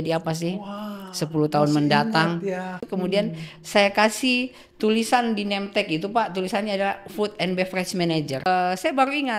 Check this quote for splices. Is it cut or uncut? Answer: cut